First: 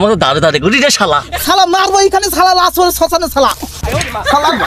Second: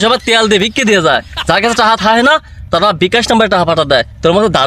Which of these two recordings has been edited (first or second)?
first